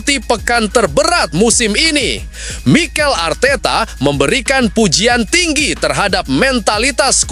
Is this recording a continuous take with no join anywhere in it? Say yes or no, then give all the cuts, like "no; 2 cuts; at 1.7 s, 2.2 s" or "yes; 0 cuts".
yes; 0 cuts